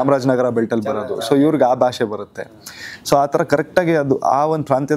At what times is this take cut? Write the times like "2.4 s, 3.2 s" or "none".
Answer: none